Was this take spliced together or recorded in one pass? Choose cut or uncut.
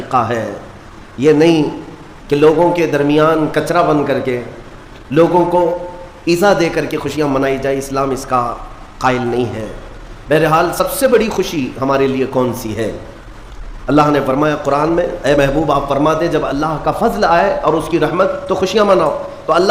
uncut